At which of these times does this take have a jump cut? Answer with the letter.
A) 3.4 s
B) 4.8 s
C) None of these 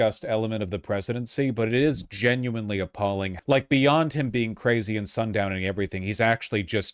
A